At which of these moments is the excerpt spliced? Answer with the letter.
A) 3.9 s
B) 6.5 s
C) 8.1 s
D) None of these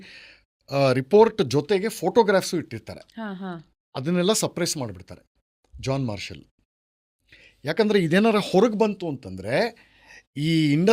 D